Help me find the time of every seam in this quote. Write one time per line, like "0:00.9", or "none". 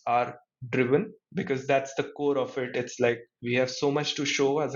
0:03.3